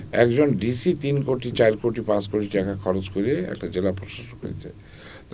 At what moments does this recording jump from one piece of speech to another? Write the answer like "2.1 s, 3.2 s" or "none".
none